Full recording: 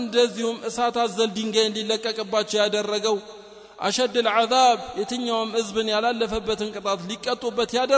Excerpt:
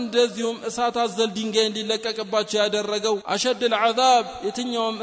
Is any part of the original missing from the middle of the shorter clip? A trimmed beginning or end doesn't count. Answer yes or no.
yes